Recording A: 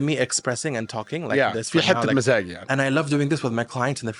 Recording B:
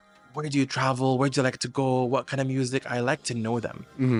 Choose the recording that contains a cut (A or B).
A